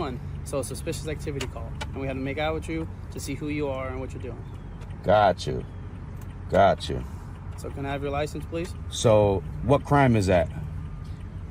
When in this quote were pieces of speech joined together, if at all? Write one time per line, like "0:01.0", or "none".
none

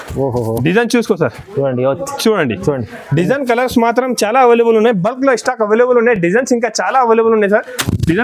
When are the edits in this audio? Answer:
none

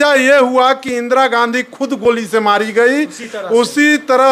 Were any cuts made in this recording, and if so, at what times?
none

